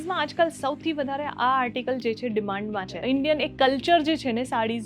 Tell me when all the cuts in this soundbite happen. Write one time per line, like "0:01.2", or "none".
0:03.0